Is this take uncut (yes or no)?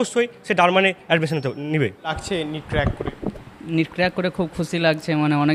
yes